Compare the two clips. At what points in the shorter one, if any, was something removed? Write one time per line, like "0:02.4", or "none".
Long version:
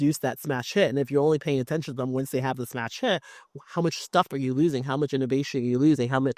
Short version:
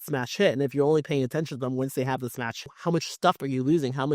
0:02.5